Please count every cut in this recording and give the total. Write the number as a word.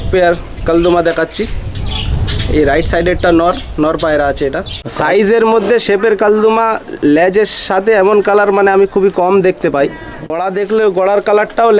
two